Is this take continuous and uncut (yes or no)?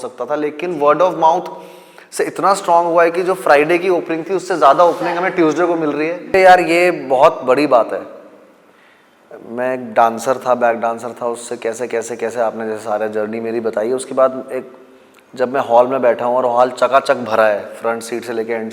no